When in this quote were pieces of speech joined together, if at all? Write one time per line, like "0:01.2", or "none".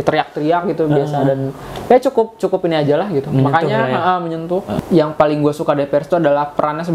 0:04.7